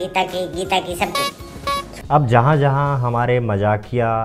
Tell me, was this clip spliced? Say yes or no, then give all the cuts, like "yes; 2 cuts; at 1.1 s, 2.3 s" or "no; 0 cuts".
yes; 1 cut; at 1.9 s